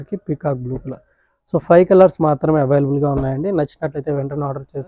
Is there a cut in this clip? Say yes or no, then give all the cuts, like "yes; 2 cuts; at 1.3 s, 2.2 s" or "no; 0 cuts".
no; 0 cuts